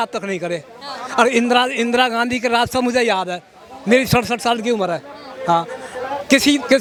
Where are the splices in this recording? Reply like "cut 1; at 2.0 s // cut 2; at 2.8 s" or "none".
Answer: none